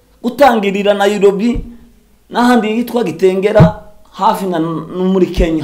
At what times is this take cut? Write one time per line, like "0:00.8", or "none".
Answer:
none